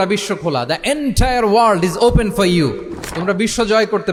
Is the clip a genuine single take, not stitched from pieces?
yes; 0 cuts

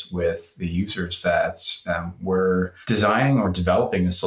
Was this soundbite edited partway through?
yes; 1 cut; at 2.8 s

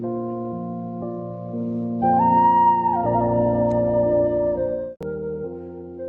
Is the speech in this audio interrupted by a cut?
yes; 1 cut; at 4.8 s

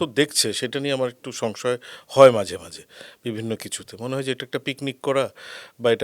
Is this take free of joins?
yes; 0 cuts

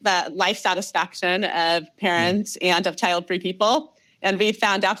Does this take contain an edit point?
no; 0 cuts

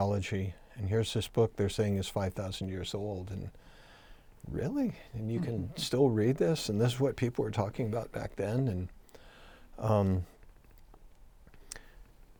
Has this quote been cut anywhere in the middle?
no; 0 cuts

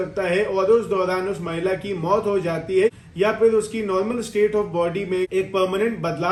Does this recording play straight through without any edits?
yes; 0 cuts

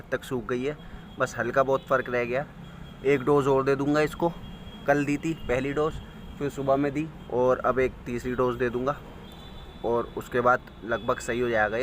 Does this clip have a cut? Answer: no; 0 cuts

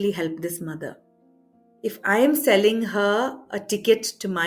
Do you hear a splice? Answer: yes; 1 cut; at 1.7 s

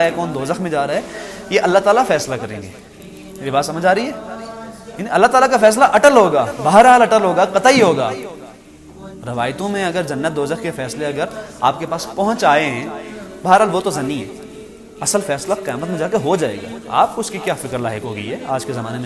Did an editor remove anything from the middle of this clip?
no; 0 cuts

